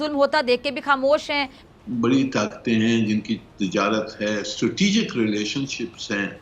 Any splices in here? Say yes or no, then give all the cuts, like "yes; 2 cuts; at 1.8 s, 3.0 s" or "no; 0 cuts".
yes; 1 cut; at 1.6 s